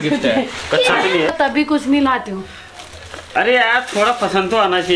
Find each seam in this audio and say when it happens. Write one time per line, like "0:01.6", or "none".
0:01.3